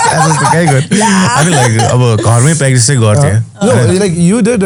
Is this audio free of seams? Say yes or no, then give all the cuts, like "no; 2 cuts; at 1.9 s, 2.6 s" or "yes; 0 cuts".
yes; 0 cuts